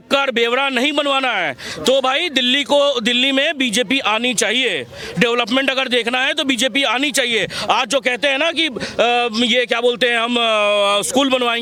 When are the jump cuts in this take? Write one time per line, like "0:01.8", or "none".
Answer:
none